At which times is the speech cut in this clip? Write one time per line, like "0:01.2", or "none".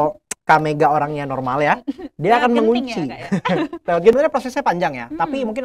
0:04.1